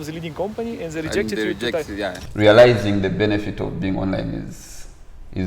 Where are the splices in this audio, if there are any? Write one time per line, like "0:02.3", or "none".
0:02.2